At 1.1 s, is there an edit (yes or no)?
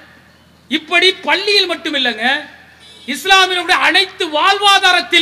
no